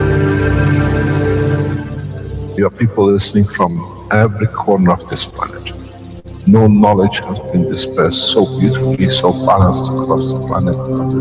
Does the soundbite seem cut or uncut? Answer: uncut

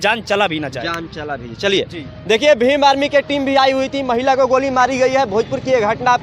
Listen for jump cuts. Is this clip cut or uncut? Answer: uncut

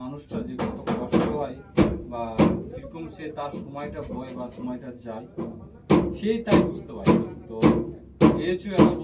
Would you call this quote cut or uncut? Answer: uncut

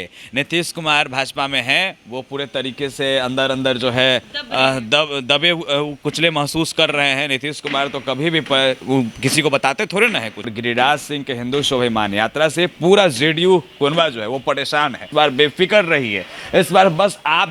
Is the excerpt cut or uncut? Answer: cut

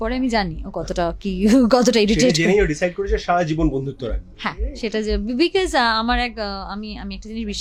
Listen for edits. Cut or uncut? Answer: uncut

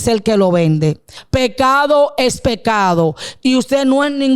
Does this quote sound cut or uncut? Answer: cut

